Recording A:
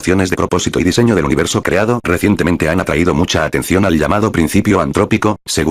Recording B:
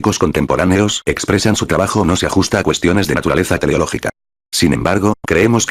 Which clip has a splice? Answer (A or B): B